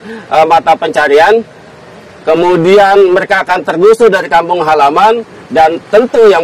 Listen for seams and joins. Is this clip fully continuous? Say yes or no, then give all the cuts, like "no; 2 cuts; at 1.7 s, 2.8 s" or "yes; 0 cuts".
yes; 0 cuts